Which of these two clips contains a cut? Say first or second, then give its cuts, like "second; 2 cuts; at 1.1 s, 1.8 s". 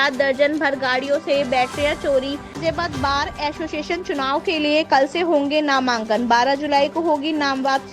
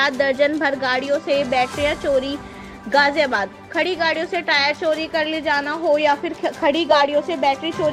first; 1 cut; at 2.6 s